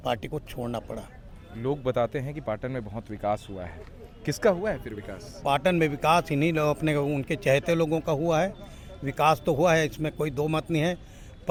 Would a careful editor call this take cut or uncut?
uncut